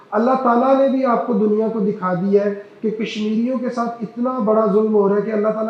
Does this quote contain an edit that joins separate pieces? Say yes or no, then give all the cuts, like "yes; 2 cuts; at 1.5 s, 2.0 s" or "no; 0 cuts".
no; 0 cuts